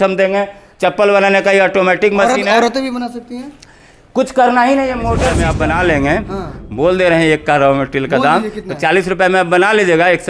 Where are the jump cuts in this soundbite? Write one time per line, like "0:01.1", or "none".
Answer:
0:05.2